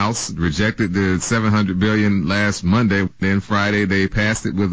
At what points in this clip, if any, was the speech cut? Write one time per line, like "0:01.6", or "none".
0:03.2

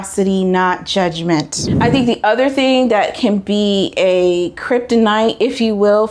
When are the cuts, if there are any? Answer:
0:01.6

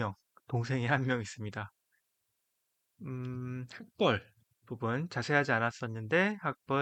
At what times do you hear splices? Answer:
none

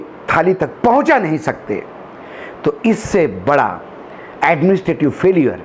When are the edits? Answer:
none

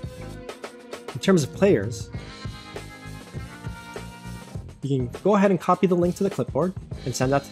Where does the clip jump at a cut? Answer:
0:01.2

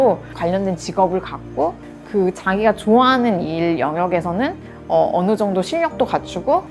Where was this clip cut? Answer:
0:01.8

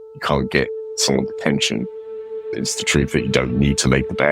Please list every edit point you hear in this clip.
0:02.3

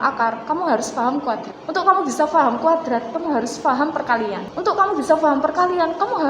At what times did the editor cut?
0:01.5
0:04.5

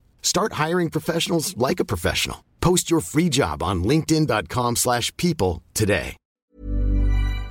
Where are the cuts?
0:06.3

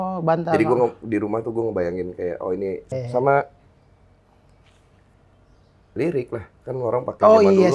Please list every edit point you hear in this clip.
0:03.0

